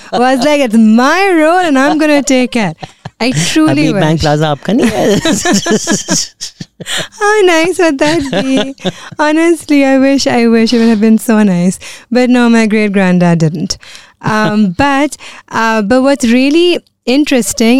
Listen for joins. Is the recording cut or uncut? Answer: uncut